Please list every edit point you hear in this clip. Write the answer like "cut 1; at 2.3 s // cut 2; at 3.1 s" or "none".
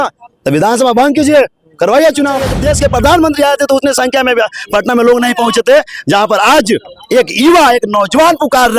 cut 1; at 2.6 s